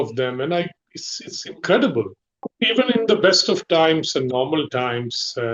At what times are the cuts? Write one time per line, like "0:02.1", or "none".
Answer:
0:02.5

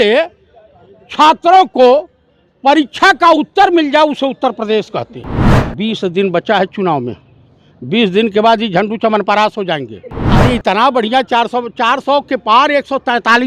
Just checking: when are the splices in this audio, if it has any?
0:05.5
0:10.2

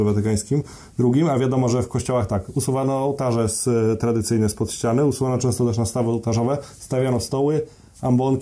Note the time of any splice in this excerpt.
none

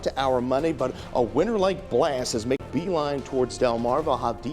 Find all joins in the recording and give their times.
0:02.6

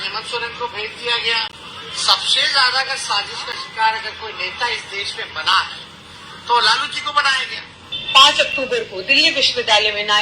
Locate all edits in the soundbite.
0:01.5
0:07.9

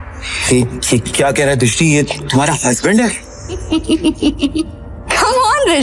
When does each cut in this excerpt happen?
0:03.6

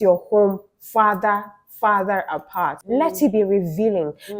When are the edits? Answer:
0:02.8

